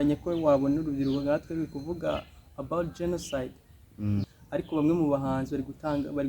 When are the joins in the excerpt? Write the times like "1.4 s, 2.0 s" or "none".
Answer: 4.2 s